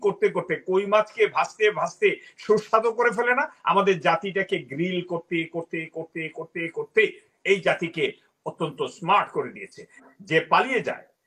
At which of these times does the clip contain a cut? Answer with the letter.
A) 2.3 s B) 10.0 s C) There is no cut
B